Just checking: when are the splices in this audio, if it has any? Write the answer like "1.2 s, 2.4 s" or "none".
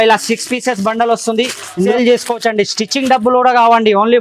1.7 s